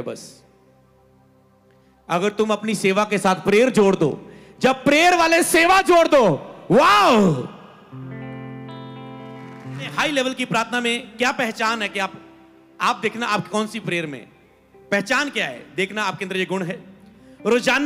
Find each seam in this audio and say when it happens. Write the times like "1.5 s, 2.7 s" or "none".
9.9 s